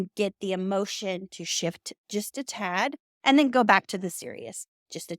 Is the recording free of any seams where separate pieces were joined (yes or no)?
yes